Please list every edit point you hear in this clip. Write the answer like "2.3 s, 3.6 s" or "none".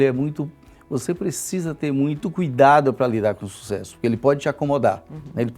2.2 s